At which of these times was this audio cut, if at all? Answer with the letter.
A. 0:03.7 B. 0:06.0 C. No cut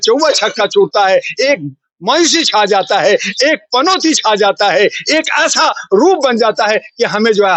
C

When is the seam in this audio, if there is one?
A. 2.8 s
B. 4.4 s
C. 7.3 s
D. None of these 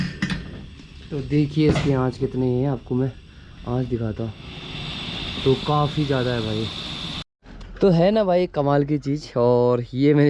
C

